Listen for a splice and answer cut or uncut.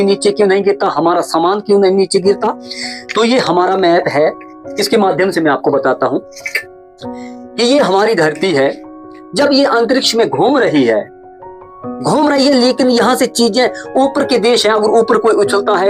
uncut